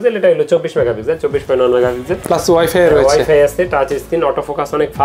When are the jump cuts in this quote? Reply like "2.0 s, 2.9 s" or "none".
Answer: none